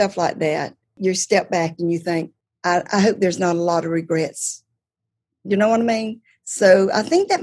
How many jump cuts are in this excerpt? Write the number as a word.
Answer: two